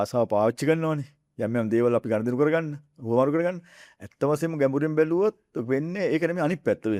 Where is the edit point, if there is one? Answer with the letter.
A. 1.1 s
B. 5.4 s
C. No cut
C